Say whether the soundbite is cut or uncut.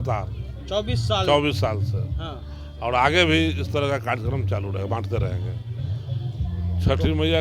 uncut